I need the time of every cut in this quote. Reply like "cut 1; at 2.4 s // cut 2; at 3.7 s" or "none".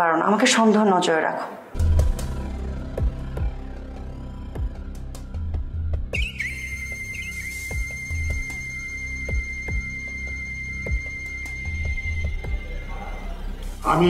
cut 1; at 1.7 s